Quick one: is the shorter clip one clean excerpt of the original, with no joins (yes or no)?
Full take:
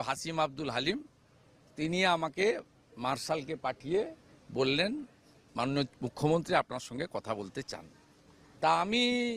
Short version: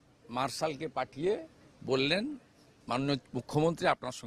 yes